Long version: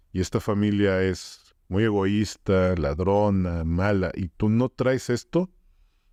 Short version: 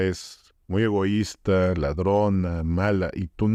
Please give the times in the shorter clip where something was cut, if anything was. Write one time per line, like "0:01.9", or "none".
none